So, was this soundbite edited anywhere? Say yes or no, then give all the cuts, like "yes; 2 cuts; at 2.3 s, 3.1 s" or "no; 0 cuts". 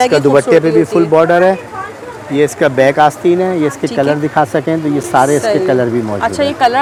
no; 0 cuts